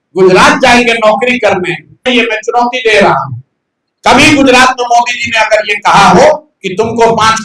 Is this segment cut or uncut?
cut